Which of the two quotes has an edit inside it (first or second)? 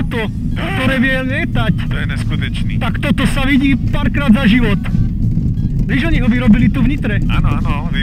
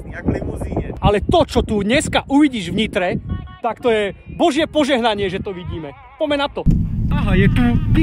second